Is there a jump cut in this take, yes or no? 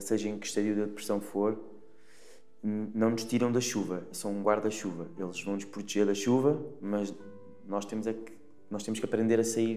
no